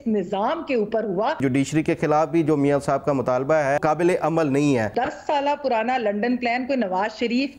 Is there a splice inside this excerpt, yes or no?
yes